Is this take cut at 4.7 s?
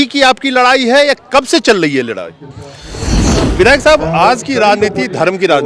no; 1 cut; at 3.1 s

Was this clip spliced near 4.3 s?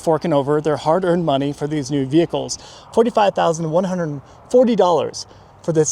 no; 1 cut; at 2.6 s

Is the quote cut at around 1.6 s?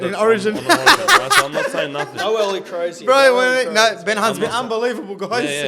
no; 0 cuts

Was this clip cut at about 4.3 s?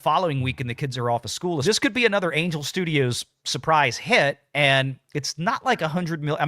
no; 1 cut; at 1.6 s

